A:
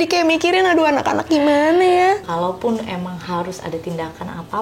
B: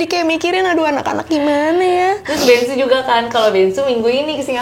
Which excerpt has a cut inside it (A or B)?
A